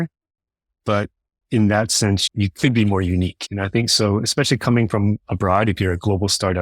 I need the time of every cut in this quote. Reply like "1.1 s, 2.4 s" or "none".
3.4 s